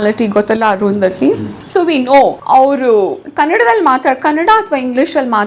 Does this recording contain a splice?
no; 0 cuts

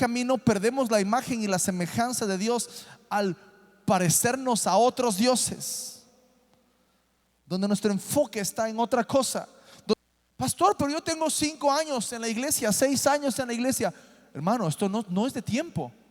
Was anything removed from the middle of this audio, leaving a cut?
yes; 1 cut; at 9.9 s

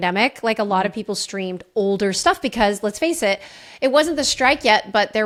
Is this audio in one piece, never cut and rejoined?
yes; 0 cuts

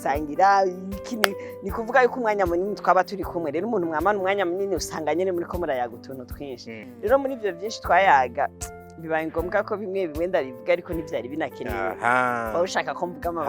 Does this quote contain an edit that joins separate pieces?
yes; 1 cut; at 6.8 s

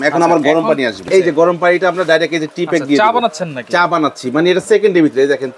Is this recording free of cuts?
no; 1 cut; at 1.1 s

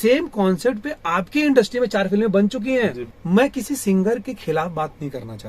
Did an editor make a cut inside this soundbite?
yes; 1 cut; at 3.1 s

